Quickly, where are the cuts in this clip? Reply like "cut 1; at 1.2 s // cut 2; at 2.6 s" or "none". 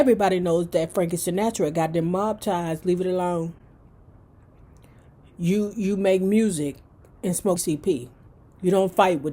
cut 1; at 7.6 s